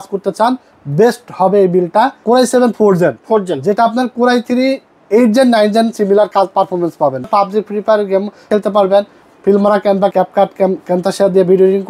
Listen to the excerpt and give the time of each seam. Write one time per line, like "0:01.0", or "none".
0:02.2
0:07.3
0:08.5
0:10.1